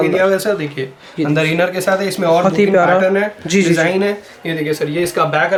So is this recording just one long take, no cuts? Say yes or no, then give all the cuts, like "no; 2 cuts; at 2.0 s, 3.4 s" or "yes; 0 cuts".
yes; 0 cuts